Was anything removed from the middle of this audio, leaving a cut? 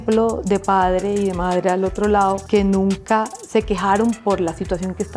no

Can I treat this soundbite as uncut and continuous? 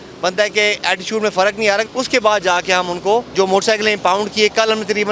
no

